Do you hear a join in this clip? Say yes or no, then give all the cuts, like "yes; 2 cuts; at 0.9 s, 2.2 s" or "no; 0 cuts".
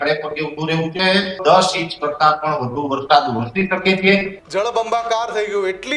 yes; 2 cuts; at 1.4 s, 4.4 s